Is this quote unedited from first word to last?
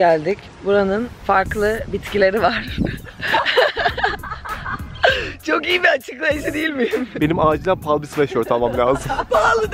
no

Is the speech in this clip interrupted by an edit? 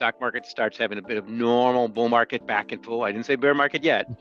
no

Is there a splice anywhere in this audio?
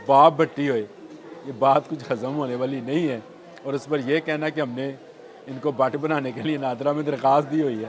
no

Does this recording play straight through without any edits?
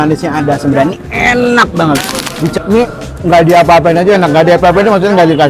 no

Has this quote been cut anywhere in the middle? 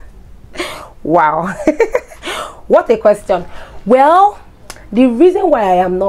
no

